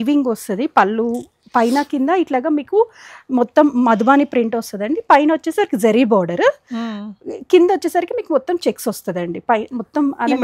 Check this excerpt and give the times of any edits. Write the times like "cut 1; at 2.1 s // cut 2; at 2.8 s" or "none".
none